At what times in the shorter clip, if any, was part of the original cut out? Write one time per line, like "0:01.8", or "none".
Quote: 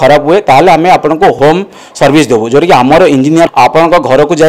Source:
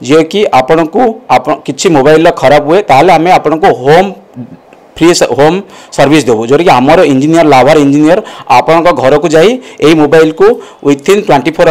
0:01.4
0:03.5